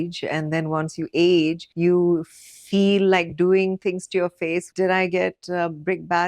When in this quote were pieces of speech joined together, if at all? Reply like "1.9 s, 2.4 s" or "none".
1.7 s, 4.7 s